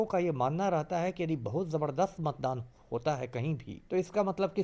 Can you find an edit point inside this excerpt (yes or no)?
yes